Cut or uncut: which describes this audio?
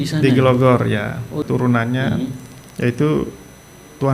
cut